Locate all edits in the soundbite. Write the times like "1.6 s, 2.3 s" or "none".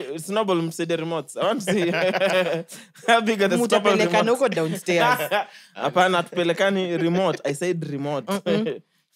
none